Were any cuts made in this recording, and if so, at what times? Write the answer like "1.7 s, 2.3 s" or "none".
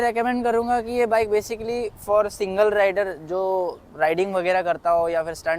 none

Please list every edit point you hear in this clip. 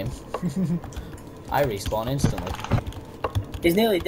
none

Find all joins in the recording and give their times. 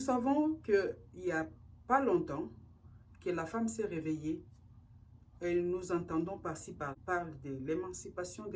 7.0 s

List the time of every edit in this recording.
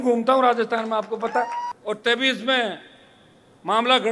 1.7 s

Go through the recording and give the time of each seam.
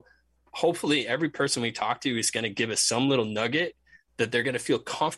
none

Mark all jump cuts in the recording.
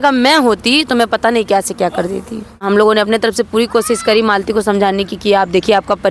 2.6 s

